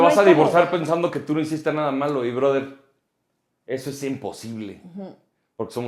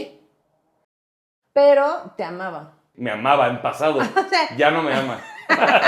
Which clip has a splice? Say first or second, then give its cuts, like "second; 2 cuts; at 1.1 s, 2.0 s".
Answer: second; 2 cuts; at 1.0 s, 2.9 s